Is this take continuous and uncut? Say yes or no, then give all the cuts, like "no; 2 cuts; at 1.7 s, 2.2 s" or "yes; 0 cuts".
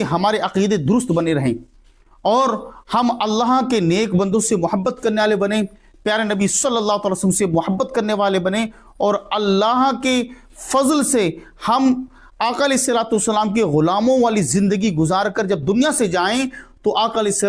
yes; 0 cuts